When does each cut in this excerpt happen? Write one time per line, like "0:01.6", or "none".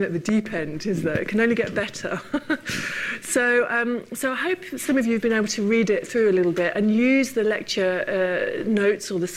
0:06.1